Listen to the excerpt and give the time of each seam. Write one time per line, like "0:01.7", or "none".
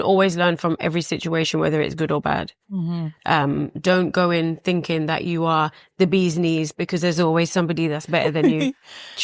none

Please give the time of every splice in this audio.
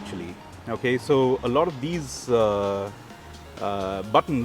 none

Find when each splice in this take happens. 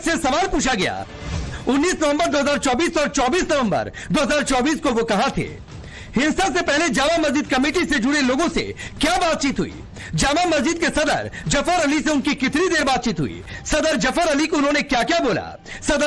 none

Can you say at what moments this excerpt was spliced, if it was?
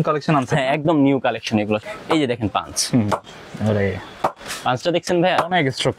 0:01.8

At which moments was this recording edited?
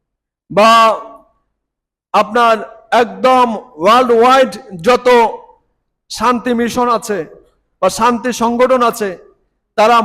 none

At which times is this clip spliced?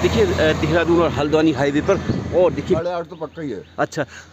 0:02.8

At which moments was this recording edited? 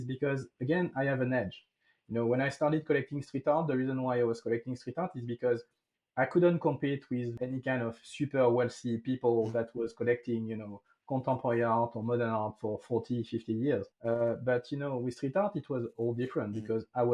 0:07.4
0:13.9

